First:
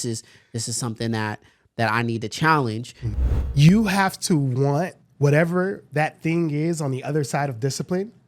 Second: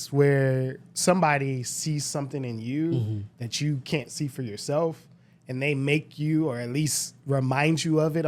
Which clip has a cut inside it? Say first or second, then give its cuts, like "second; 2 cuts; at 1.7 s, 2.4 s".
first; 2 cuts; at 3.0 s, 5.0 s